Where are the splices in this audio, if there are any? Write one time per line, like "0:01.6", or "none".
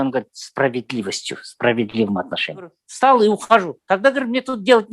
0:02.8

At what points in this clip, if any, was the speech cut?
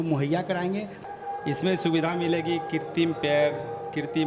0:01.0

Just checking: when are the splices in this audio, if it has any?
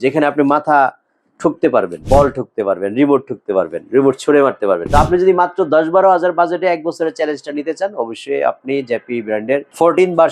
0:02.0
0:04.8

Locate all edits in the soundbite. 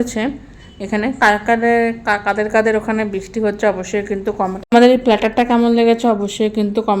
0:04.7

